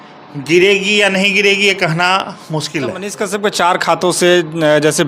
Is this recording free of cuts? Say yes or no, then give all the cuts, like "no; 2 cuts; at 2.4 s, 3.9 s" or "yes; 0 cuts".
no; 1 cut; at 3.0 s